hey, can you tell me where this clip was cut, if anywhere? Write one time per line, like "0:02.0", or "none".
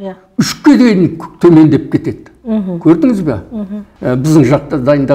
none

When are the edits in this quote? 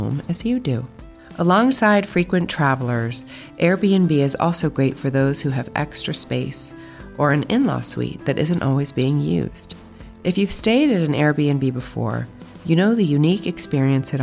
none

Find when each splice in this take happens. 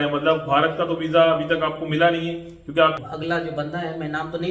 0:03.0

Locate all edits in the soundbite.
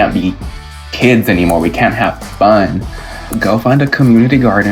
0:03.3

